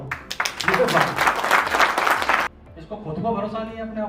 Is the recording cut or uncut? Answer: cut